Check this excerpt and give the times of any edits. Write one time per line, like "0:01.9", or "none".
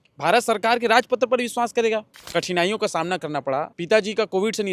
0:02.2
0:03.7